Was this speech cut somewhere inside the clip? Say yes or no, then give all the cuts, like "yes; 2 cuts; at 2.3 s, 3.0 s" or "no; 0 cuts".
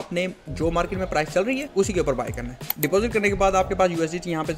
yes; 2 cuts; at 1.7 s, 2.6 s